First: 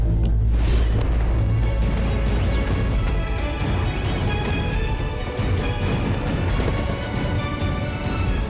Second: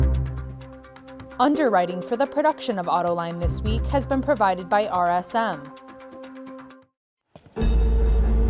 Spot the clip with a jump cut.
second; 3 cuts; at 1.4 s, 5.6 s, 6.7 s

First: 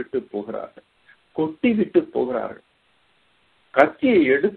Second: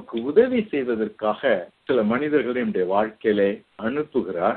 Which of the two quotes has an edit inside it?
second; 2 cuts; at 1.7 s, 3.7 s

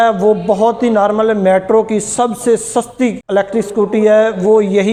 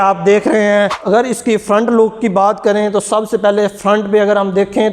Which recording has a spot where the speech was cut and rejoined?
second; 1 cut; at 0.9 s

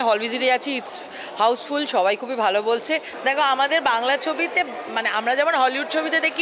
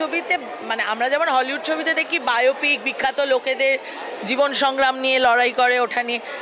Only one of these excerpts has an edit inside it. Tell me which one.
first; 1 cut; at 3.1 s

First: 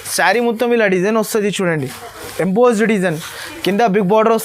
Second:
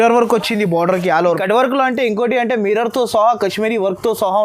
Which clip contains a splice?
second; 1 cut; at 1.4 s

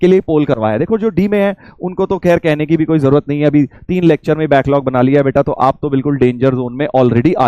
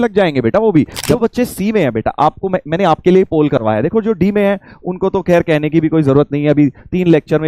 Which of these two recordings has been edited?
second; 1 cut; at 1.0 s

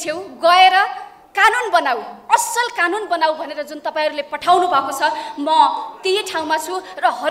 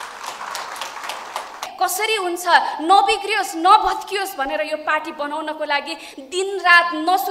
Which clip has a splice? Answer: second; 1 cut; at 1.7 s

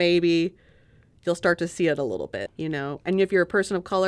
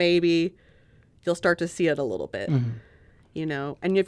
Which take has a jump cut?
first; 1 cut; at 2.4 s

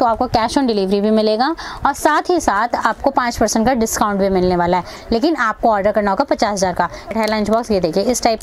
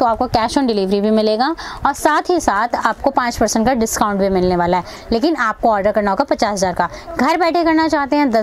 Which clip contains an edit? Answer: first; 1 cut; at 7.1 s

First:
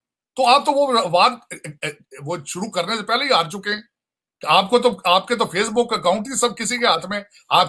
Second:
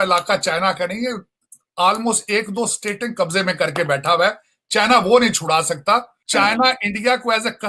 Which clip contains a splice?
second; 1 cut; at 6.2 s

